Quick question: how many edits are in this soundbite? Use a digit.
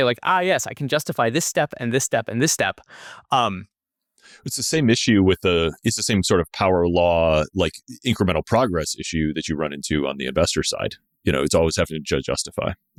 0